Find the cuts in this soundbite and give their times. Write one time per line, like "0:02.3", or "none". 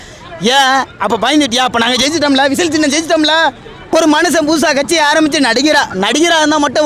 0:03.9